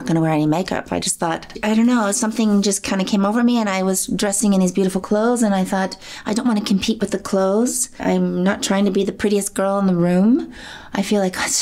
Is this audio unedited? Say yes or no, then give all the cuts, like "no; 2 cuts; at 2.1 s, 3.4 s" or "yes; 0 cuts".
yes; 0 cuts